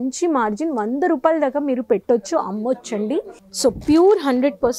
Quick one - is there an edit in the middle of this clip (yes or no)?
yes